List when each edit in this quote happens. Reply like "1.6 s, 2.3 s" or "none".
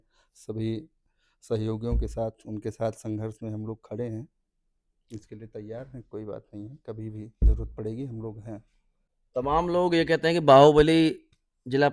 none